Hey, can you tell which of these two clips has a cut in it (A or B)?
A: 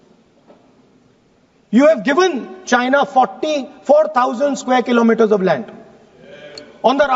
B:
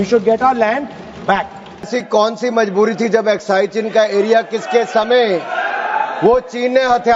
B